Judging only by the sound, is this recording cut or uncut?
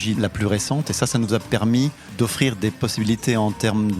cut